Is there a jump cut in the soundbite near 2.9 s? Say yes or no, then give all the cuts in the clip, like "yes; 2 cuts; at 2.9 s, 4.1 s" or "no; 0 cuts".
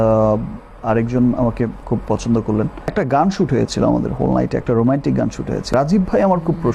yes; 2 cuts; at 2.9 s, 5.7 s